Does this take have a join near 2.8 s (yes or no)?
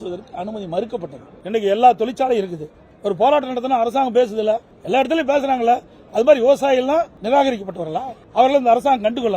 no